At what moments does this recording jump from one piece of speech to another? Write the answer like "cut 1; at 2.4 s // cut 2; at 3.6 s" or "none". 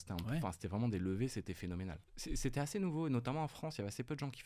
cut 1; at 2.1 s